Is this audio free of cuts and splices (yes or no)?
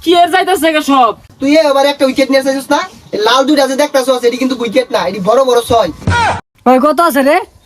no